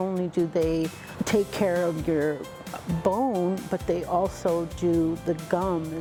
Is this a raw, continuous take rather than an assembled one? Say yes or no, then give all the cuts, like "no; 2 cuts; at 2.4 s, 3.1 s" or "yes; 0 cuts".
yes; 0 cuts